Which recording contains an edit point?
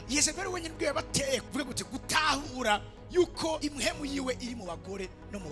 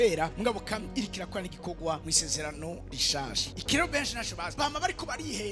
second; 1 cut; at 3.4 s

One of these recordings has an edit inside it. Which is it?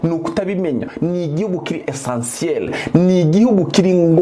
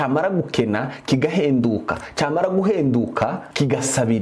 first; 1 cut; at 0.9 s

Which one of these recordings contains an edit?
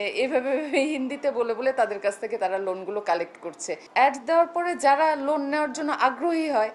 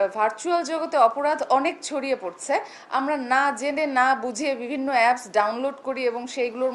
first; 1 cut; at 3.7 s

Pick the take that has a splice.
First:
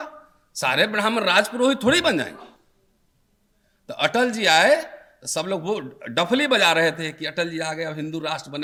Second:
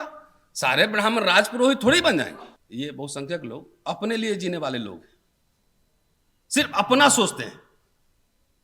second; 1 cut; at 2.5 s

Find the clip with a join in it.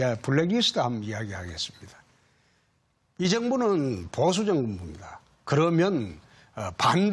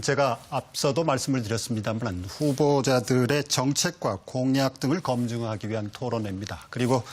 second; 1 cut; at 1.7 s

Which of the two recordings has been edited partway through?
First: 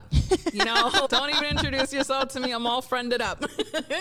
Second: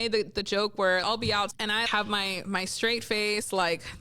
second; 1 cut; at 1.5 s

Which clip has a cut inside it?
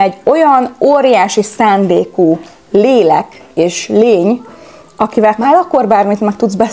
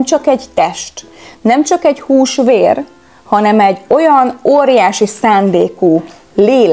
first; 1 cut; at 5.4 s

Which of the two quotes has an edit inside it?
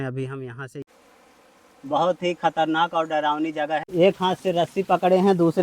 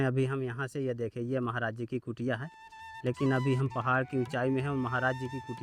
first; 2 cuts; at 0.8 s, 3.9 s

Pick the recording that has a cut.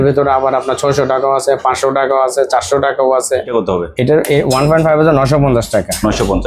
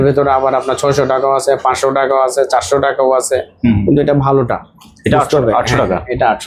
first; 1 cut; at 3.5 s

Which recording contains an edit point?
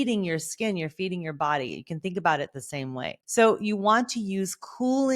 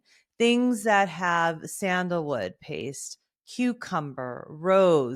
first; 1 cut; at 3.2 s

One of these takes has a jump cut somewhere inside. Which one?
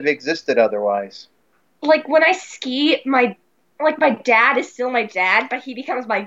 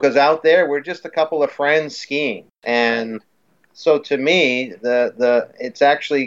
second; 1 cut; at 2.5 s

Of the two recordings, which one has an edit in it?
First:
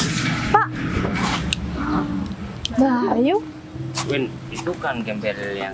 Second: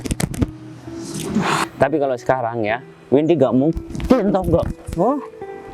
second; 1 cut; at 1.6 s

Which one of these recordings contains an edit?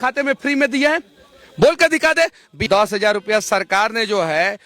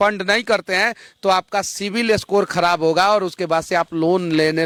first; 1 cut; at 2.7 s

